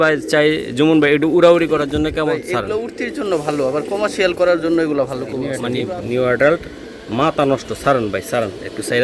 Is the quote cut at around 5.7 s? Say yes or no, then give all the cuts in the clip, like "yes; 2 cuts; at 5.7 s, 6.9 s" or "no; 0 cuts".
yes; 1 cut; at 5.7 s